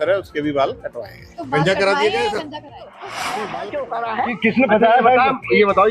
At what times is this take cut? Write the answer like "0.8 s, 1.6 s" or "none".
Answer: 3.3 s